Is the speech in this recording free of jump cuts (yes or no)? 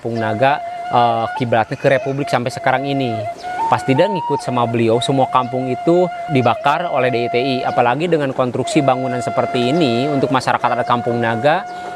yes